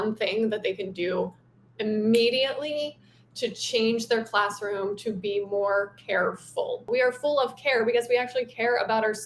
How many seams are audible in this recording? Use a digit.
1